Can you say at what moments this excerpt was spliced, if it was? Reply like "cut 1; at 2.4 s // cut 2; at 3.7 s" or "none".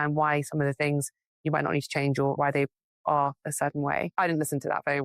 cut 1; at 2.4 s // cut 2; at 4.1 s